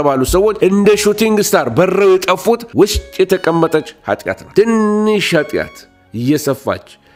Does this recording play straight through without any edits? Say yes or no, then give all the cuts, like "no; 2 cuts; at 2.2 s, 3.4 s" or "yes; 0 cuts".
yes; 0 cuts